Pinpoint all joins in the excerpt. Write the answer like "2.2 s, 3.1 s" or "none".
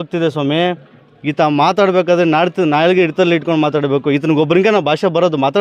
none